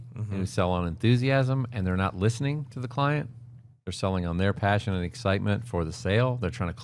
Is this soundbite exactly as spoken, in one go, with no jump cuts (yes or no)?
yes